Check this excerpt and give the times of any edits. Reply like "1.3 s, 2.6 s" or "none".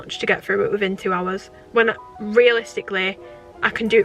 1.5 s